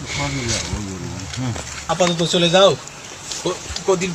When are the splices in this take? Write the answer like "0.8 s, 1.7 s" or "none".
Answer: 1.9 s

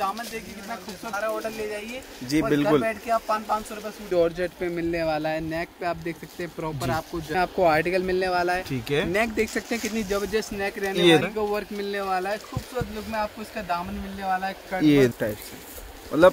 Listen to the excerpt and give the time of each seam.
1.1 s, 4.0 s, 7.3 s, 11.2 s, 15.1 s

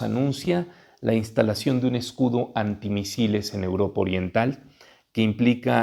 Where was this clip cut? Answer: none

